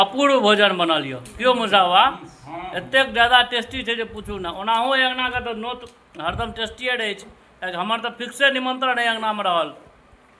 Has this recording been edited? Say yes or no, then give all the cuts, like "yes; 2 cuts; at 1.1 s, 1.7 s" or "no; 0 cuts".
no; 0 cuts